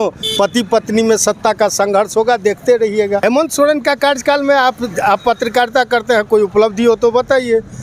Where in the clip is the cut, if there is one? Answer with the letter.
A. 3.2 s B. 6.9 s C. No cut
A